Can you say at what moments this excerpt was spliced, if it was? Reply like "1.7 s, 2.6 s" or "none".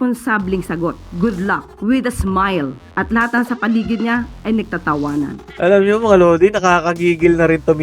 5.4 s